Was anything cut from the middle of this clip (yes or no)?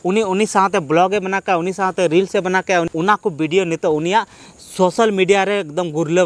yes